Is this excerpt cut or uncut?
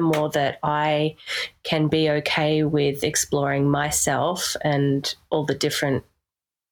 uncut